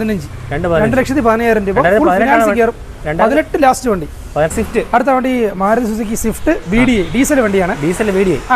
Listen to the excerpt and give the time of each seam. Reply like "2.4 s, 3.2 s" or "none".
4.5 s